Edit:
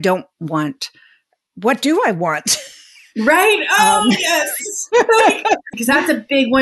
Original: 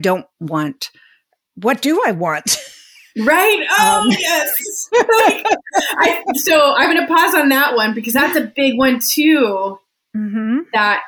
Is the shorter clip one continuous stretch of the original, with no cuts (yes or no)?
no